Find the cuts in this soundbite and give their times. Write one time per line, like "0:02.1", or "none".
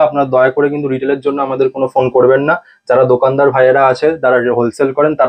none